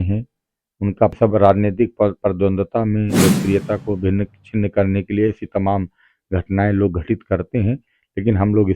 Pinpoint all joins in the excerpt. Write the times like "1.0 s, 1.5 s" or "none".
1.2 s